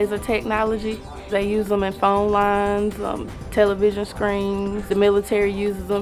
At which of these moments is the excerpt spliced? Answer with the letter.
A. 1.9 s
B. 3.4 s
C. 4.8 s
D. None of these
C